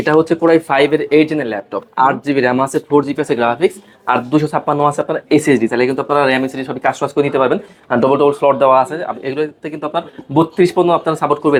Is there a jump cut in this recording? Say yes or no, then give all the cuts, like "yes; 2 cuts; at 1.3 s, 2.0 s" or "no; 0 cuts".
no; 0 cuts